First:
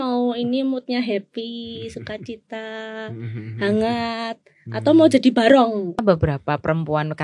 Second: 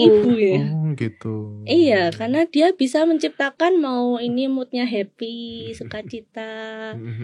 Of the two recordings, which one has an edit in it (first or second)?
first